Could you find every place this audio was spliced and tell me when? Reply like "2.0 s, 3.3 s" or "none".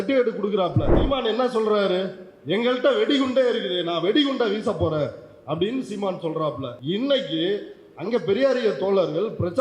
1.0 s, 6.7 s